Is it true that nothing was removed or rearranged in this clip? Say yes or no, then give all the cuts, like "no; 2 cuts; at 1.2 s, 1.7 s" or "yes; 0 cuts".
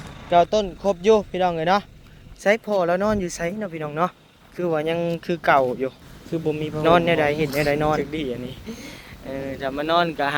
no; 1 cut; at 8.0 s